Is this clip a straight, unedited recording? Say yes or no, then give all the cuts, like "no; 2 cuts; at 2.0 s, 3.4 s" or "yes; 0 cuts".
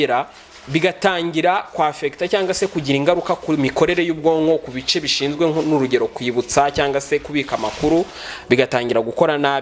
yes; 0 cuts